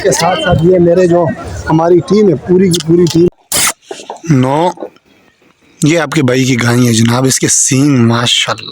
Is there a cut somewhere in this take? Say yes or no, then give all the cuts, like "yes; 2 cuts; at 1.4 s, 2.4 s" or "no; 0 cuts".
yes; 1 cut; at 3.3 s